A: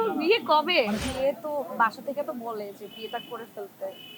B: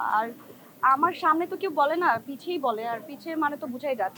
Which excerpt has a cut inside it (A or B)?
A